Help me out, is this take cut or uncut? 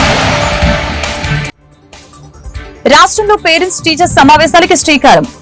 cut